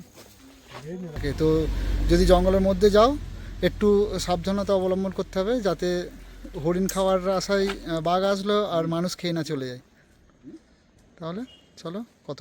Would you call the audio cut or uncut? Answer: cut